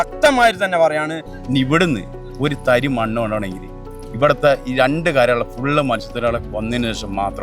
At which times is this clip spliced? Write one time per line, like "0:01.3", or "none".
0:01.2